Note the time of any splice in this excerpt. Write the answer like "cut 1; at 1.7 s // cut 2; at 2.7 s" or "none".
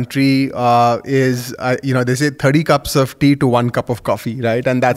none

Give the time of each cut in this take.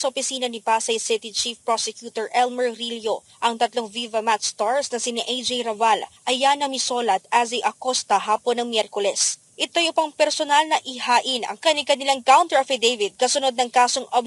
none

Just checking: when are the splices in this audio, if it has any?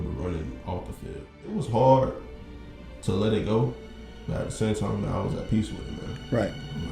cut 1; at 1.6 s

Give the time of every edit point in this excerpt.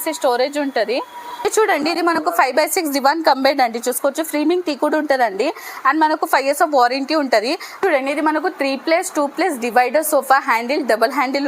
cut 1; at 1.1 s // cut 2; at 7.8 s

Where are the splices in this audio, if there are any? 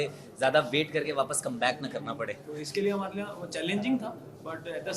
cut 1; at 2.4 s

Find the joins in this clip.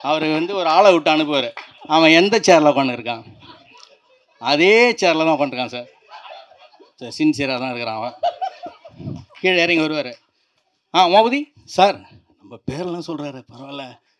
none

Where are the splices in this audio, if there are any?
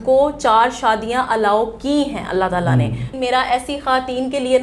cut 1; at 3.1 s

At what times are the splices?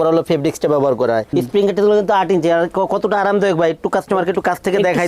cut 1; at 1.3 s

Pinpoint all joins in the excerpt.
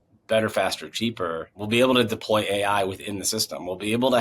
cut 1; at 1.6 s

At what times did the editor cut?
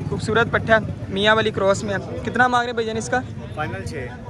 none

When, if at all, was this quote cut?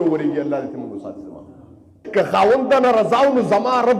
cut 1; at 2.0 s

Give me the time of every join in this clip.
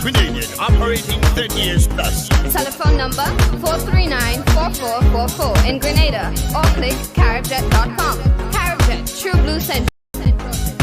cut 1; at 9.9 s

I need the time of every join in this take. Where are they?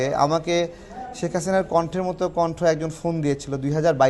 none

